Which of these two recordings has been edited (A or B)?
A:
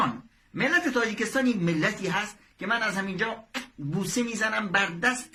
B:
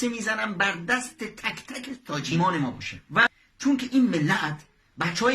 B